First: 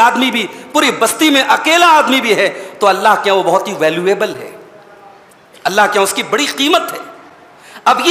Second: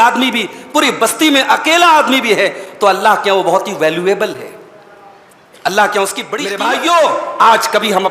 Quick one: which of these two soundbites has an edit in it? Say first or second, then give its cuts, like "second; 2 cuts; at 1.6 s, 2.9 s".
second; 1 cut; at 6.4 s